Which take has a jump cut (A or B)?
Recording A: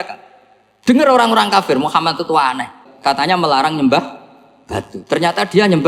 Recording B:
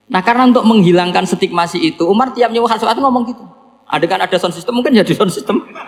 A